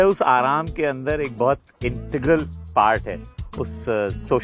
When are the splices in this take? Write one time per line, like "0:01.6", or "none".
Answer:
none